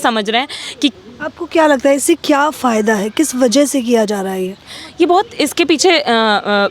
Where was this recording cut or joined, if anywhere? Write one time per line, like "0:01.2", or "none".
0:00.9